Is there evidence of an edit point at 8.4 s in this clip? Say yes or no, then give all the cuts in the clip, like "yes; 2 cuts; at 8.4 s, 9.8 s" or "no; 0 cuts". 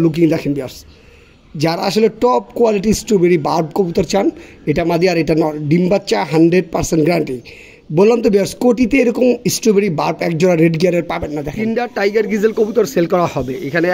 no; 1 cut; at 11.5 s